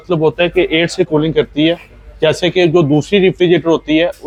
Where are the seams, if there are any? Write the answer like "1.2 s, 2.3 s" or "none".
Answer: none

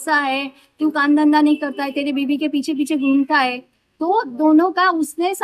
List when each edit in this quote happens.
none

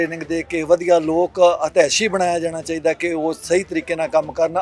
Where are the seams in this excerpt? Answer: none

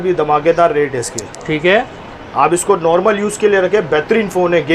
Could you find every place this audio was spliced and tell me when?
none

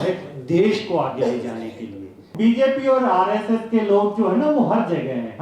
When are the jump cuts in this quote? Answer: 2.3 s

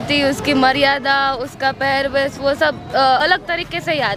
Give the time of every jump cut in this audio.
none

